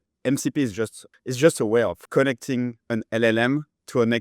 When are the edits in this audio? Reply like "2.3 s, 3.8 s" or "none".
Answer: 1.0 s, 2.0 s